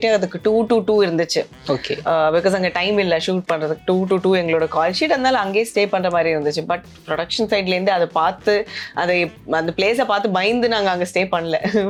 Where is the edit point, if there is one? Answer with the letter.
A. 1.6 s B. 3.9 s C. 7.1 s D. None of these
D